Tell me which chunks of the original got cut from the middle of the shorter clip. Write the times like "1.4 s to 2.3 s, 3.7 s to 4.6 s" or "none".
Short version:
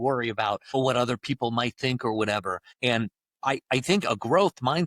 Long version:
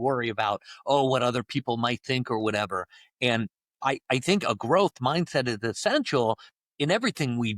0.7 s to 1.0 s, 2.9 s to 3.0 s